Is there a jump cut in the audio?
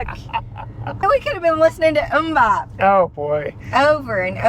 yes; 1 cut; at 1.0 s

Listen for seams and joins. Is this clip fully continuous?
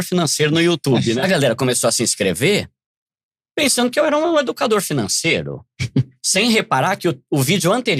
no; 1 cut; at 1.2 s

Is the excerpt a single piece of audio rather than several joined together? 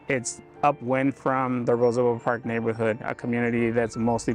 yes; 0 cuts

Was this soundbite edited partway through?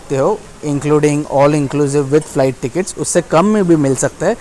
no; 0 cuts

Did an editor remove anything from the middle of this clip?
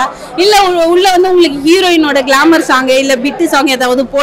no; 0 cuts

